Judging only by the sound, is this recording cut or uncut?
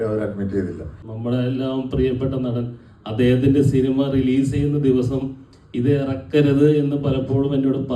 cut